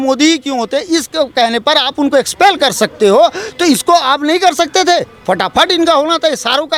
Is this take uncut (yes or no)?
yes